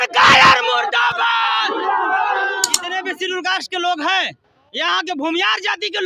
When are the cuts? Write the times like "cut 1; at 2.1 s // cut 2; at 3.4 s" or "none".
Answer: cut 1; at 2.7 s